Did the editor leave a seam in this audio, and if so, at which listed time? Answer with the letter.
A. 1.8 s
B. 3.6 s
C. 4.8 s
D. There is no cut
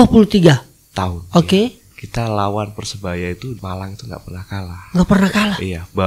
B